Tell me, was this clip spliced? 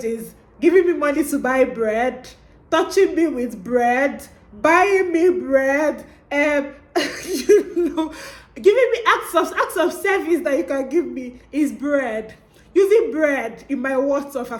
no; 0 cuts

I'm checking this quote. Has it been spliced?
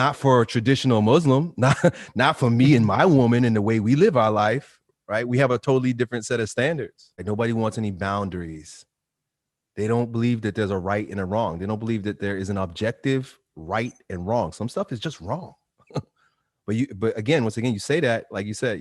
yes; 1 cut; at 7.1 s

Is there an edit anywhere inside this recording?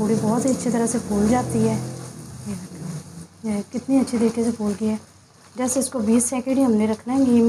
yes; 1 cut; at 3.3 s

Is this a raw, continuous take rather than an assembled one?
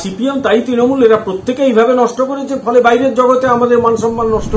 yes; 0 cuts

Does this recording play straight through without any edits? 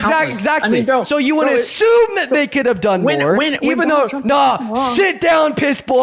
yes; 0 cuts

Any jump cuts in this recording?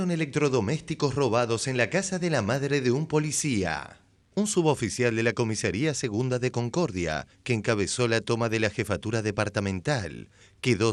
no; 0 cuts

